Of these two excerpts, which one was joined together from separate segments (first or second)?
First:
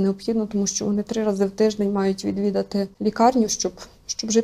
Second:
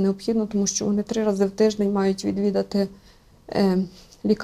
first